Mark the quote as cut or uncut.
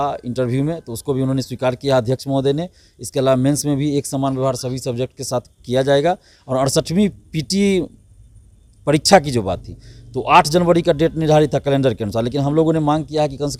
uncut